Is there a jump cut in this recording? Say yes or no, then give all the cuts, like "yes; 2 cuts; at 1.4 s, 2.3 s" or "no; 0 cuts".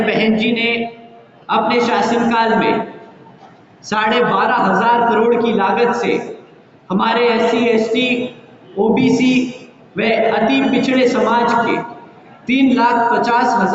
no; 0 cuts